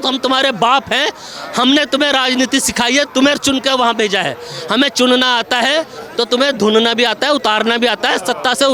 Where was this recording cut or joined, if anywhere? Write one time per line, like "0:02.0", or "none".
none